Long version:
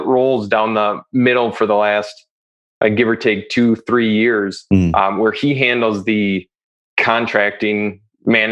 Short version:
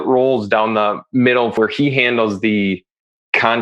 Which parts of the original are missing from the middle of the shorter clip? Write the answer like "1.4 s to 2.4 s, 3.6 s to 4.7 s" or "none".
1.5 s to 5.2 s